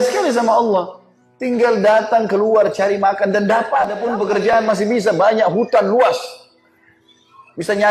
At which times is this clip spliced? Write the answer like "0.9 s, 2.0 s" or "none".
4.5 s